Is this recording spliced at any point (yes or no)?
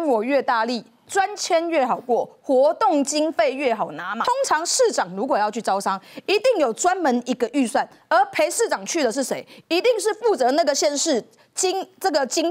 yes